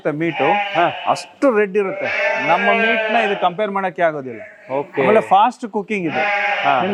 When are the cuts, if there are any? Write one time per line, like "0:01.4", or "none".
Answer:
none